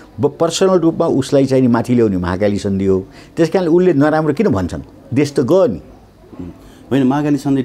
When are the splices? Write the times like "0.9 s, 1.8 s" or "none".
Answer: none